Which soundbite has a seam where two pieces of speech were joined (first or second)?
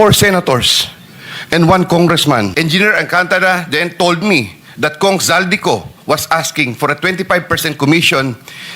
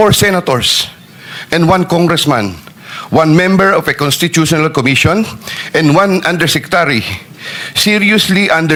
first